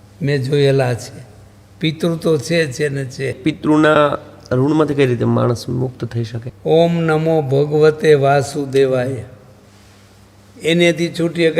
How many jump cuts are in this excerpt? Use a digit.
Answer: 2